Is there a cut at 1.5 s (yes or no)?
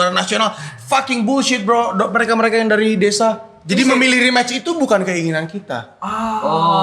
no